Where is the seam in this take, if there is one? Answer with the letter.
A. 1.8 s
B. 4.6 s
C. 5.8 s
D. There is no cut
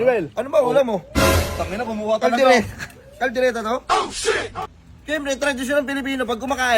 B